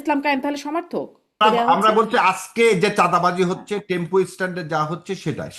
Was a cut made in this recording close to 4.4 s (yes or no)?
no